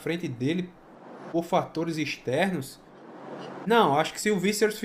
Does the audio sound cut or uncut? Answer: uncut